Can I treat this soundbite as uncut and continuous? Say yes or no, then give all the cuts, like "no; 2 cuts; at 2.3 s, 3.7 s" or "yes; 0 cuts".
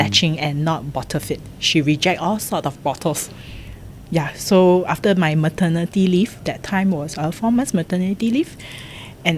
yes; 0 cuts